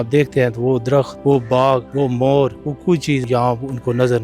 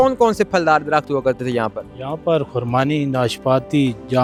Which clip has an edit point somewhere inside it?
first; 3 cuts; at 1.1 s, 1.9 s, 3.1 s

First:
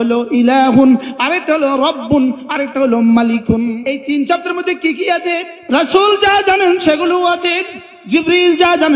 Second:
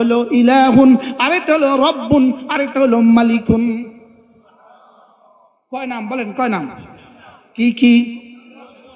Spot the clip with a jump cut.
first; 2 cuts; at 3.8 s, 5.5 s

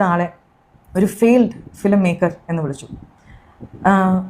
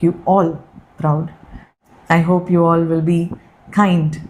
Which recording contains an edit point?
second; 1 cut; at 1.7 s

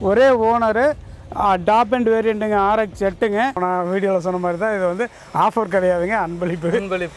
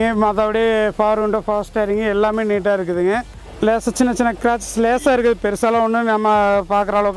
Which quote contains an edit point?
first; 1 cut; at 3.6 s

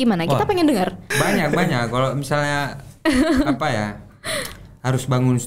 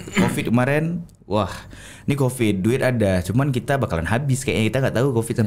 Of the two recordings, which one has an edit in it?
first; 1 cut; at 1.1 s

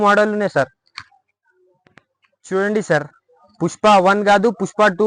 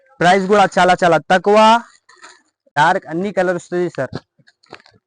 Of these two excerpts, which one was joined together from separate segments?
second; 1 cut; at 2.8 s

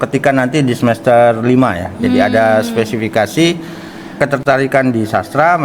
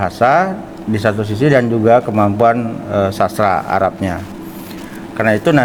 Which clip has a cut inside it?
first; 1 cut; at 4.2 s

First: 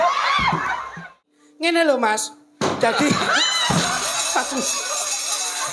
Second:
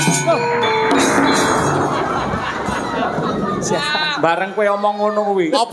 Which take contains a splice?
first; 1 cut; at 1.6 s

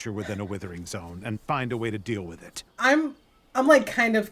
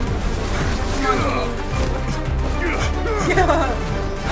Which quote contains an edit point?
first; 1 cut; at 2.6 s

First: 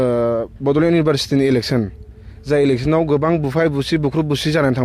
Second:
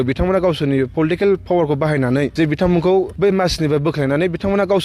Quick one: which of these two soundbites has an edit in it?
second; 2 cuts; at 2.3 s, 3.1 s

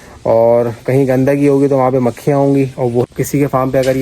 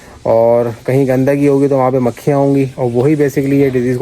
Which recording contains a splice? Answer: first; 1 cut; at 3.0 s

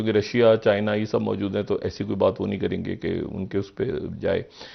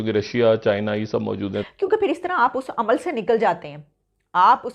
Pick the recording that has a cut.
second; 1 cut; at 1.6 s

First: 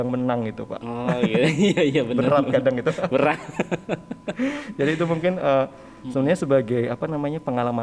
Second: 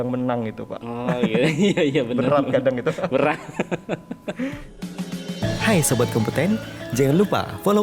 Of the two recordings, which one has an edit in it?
second; 1 cut; at 4.6 s

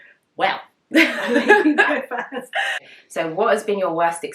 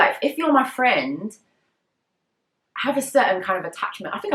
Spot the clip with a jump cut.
first; 1 cut; at 2.7 s

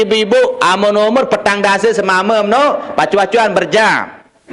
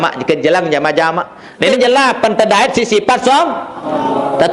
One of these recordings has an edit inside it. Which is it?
second; 1 cut; at 1.7 s

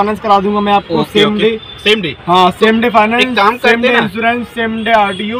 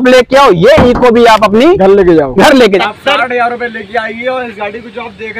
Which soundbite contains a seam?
second; 1 cut; at 2.8 s

